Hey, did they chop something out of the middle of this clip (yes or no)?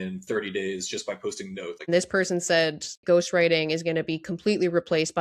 yes